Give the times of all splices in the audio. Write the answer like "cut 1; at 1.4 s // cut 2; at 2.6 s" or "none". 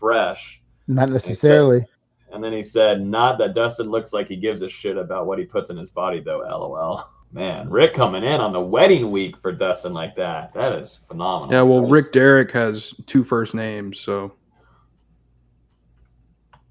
cut 1; at 7.1 s